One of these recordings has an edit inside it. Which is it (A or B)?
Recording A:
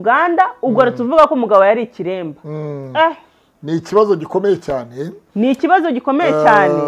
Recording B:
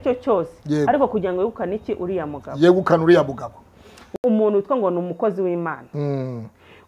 B